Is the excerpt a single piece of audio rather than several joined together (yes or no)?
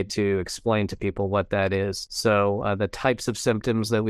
no